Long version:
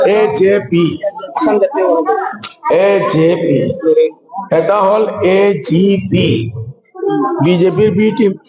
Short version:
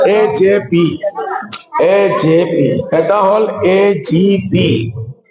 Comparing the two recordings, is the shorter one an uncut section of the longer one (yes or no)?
no